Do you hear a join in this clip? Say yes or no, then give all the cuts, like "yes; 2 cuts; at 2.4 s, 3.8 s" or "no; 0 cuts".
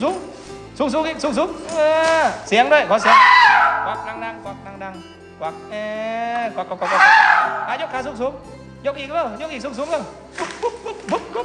no; 0 cuts